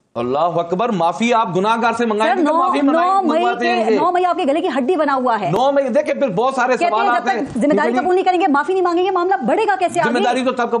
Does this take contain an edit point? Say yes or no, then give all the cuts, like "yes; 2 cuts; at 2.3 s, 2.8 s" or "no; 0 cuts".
no; 0 cuts